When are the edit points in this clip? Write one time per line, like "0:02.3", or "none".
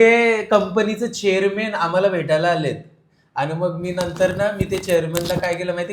none